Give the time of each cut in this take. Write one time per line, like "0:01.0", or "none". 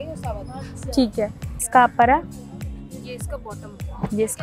0:01.7